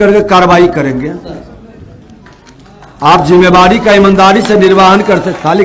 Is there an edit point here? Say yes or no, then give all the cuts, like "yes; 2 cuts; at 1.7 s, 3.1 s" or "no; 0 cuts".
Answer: no; 0 cuts